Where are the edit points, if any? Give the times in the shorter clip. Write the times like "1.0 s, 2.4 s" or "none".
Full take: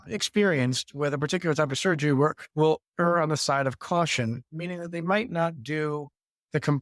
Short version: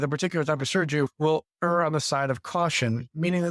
1.1 s